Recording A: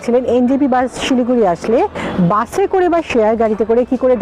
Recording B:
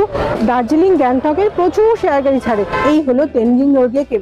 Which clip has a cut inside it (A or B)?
B